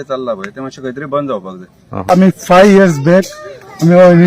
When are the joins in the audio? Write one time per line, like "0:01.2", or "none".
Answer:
0:02.4